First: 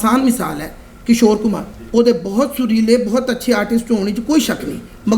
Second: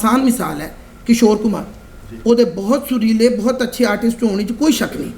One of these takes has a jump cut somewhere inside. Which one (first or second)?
first